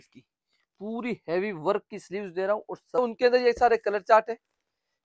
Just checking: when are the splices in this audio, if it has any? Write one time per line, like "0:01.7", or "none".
0:03.0